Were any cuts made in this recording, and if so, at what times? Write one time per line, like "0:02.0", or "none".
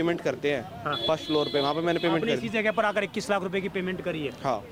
none